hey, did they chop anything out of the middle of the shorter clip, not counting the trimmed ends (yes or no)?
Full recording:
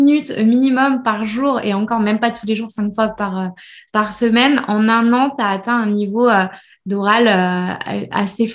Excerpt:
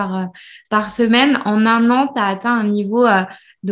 no